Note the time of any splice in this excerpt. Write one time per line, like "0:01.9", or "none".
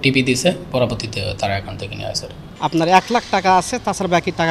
0:02.4